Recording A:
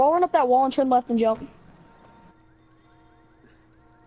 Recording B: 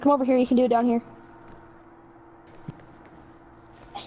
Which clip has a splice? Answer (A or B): B